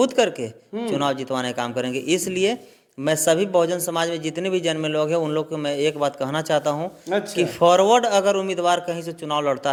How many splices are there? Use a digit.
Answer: 0